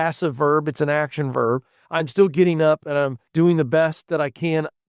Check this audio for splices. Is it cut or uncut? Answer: cut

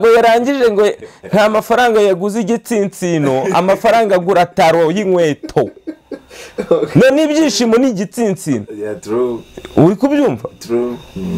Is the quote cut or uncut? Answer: uncut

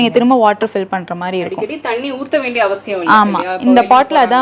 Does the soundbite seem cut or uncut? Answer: uncut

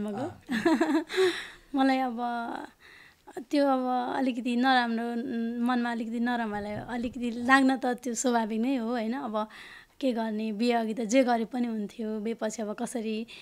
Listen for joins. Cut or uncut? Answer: uncut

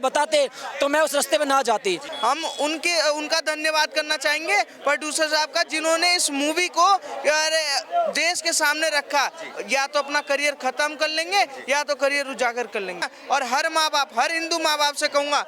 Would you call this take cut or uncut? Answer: cut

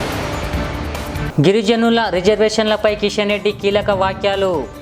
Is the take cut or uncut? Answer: cut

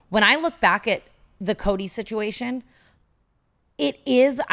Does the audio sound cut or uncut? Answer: uncut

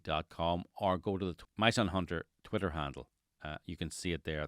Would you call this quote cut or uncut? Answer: cut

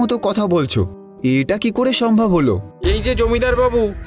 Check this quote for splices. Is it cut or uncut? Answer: cut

